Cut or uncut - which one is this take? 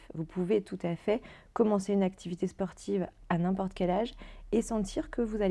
uncut